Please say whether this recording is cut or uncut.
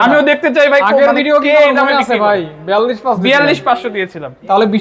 uncut